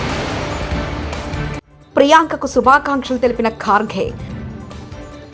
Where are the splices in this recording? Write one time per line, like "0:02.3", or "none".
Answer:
0:01.7